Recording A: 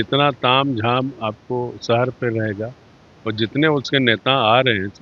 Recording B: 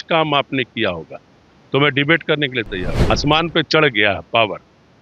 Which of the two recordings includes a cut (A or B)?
B